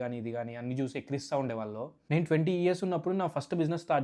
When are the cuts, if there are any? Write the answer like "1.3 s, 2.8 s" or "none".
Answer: 2.1 s